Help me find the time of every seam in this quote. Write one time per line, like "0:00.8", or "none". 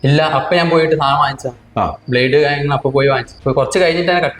0:03.3